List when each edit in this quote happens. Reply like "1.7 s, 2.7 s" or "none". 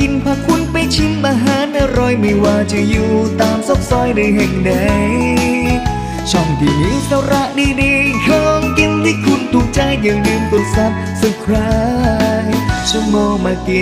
none